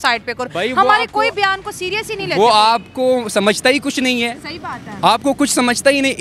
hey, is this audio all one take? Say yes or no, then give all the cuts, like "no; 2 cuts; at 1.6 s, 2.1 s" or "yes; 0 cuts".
yes; 0 cuts